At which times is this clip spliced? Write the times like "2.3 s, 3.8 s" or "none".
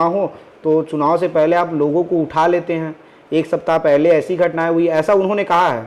none